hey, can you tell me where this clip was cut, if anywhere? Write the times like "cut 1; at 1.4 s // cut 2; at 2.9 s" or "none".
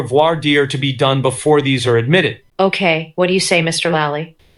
none

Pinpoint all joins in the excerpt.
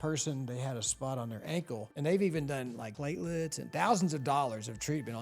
cut 1; at 1.9 s // cut 2; at 2.9 s

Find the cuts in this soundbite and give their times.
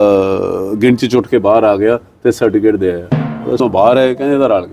cut 1; at 3.6 s

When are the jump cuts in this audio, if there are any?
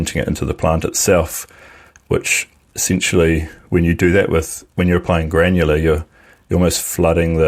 none

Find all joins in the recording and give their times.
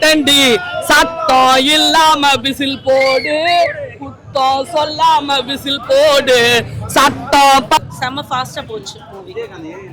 cut 1; at 7.8 s

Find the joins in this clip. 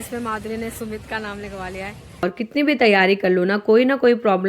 cut 1; at 2.2 s

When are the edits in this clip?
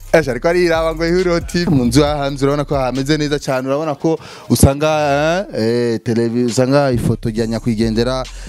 cut 1; at 1.7 s

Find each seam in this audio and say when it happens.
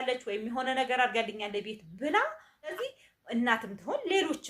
cut 1; at 2.8 s

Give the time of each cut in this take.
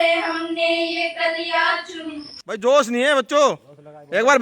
cut 1; at 2.3 s

